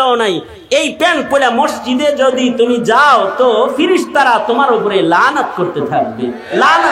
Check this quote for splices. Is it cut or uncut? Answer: uncut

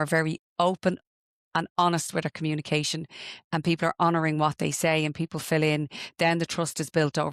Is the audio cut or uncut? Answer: uncut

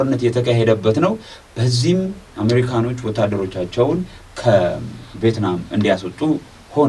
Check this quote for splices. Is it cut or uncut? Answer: uncut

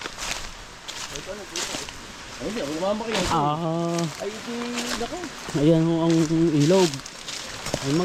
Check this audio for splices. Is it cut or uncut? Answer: uncut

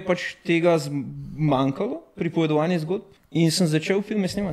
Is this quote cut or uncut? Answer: cut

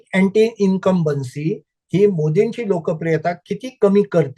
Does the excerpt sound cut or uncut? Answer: uncut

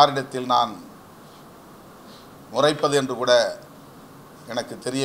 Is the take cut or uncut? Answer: uncut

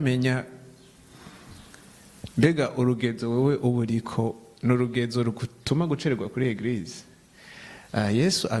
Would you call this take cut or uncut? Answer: uncut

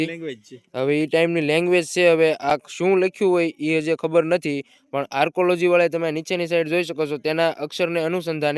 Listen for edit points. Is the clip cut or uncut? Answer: uncut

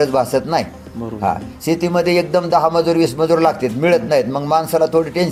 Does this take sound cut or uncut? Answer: uncut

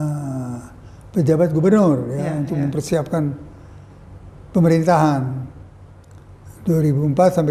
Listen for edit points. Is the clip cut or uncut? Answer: uncut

